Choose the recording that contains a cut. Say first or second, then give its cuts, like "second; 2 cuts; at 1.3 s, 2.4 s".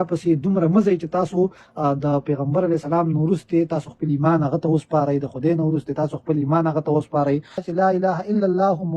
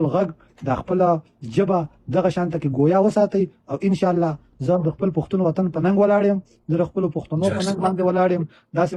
first; 1 cut; at 7.7 s